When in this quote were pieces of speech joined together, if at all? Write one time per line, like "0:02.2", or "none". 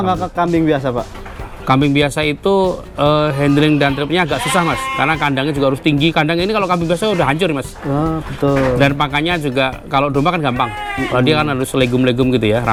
none